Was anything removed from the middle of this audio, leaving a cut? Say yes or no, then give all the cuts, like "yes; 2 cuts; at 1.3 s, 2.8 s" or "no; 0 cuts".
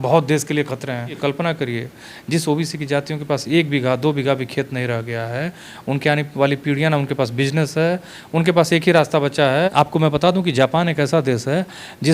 yes; 2 cuts; at 1.2 s, 9.7 s